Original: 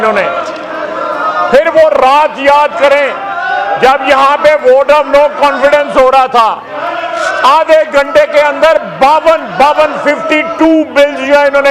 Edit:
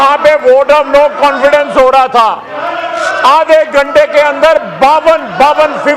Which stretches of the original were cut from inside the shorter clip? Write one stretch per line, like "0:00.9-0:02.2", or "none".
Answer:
none

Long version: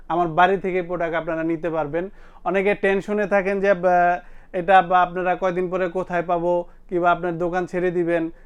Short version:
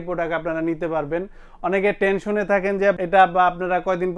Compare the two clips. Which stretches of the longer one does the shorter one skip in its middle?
0:03.8-0:04.5

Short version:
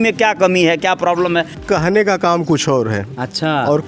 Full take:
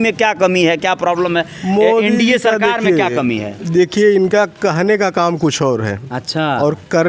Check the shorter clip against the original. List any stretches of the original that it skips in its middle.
0:01.6-0:04.5

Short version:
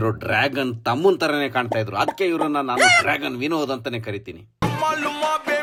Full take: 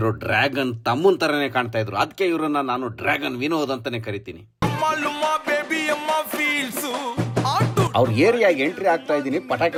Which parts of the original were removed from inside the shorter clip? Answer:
none

